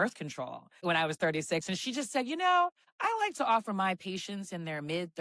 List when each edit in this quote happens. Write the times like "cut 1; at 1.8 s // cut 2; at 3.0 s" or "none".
cut 1; at 0.8 s // cut 2; at 2.9 s